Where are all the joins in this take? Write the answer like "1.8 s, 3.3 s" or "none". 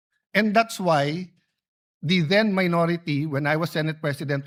none